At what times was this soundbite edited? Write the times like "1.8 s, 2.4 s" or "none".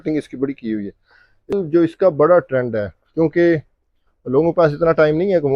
1.6 s